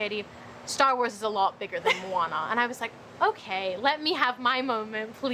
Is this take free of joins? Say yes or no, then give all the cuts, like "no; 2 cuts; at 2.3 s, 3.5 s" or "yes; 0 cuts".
yes; 0 cuts